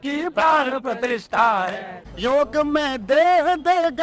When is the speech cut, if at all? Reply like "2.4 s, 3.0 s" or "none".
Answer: 1.9 s

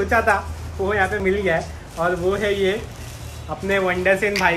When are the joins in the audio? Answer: 1.2 s

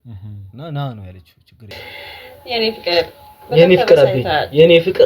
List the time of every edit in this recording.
1.7 s

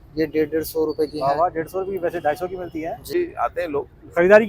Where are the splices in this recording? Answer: 3.1 s

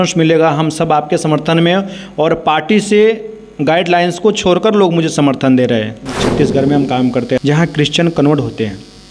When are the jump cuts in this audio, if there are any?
6.2 s, 7.4 s

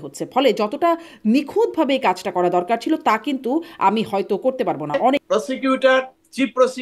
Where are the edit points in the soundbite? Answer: 5.2 s

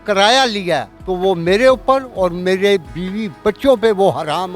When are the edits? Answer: 1.0 s, 3.0 s

